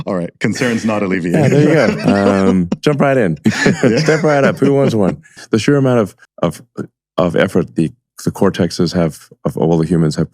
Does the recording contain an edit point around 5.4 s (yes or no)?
yes